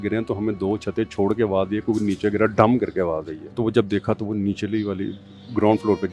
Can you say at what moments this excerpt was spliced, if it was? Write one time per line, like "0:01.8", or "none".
0:03.4